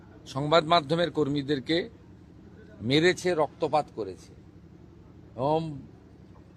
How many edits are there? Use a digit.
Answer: 0